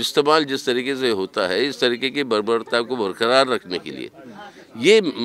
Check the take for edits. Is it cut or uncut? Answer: uncut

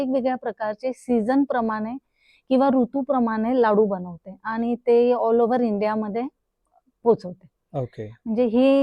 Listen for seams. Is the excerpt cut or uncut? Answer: uncut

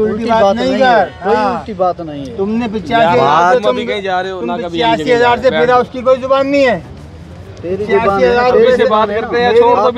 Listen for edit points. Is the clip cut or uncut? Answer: uncut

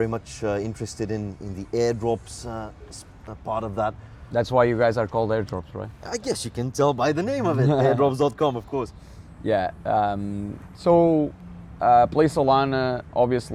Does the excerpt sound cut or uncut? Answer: uncut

